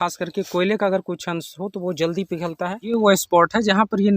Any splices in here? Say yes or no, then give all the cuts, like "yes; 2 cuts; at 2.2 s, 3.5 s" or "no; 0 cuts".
yes; 1 cut; at 2.8 s